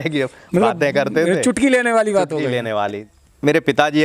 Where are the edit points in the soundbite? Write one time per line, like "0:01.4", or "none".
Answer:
0:03.0